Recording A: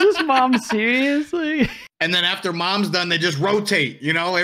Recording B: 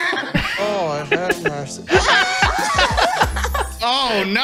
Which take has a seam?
A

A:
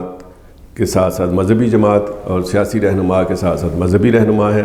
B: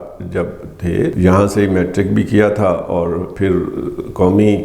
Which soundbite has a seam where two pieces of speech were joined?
B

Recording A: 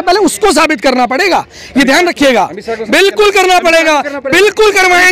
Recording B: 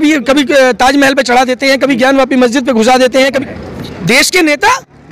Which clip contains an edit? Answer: B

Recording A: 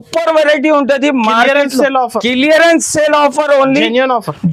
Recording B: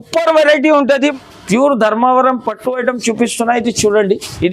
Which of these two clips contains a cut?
B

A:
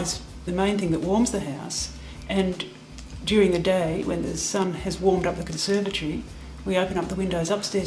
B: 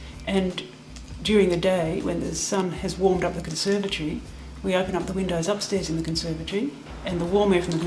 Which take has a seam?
B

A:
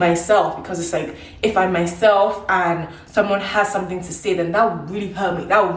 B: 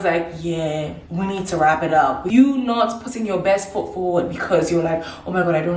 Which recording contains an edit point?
B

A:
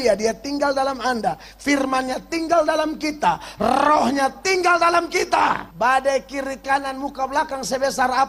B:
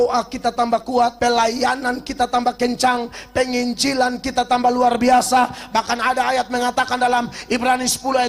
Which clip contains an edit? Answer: B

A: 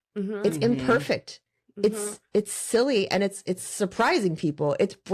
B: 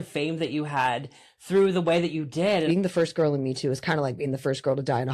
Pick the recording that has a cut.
B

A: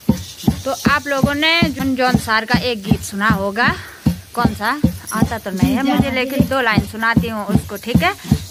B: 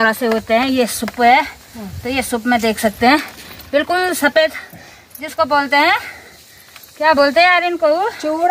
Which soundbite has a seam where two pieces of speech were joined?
A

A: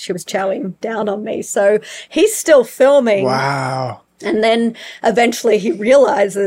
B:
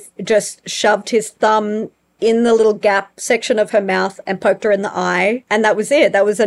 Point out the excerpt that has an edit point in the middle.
B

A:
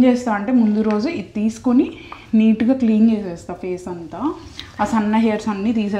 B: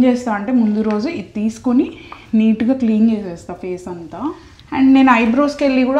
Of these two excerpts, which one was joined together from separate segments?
B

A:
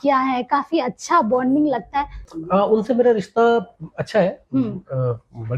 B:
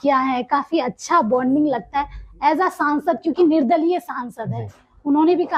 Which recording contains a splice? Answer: A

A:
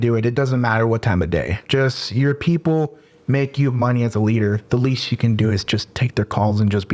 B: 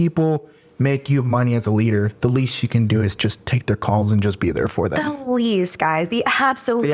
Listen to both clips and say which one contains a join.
A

